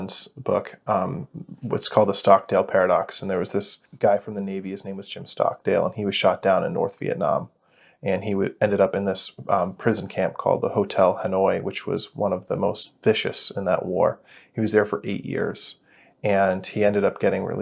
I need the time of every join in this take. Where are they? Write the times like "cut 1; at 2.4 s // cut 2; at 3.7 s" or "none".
none